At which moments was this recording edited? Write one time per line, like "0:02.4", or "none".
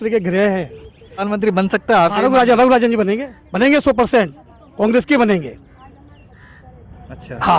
0:01.2